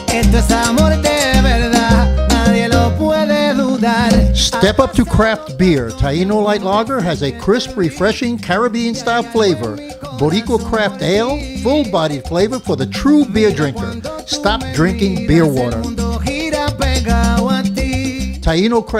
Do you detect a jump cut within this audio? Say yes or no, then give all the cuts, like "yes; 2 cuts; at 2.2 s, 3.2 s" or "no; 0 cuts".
no; 0 cuts